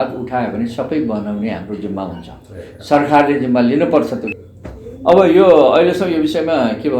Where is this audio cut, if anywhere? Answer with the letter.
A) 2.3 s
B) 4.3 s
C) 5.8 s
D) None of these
B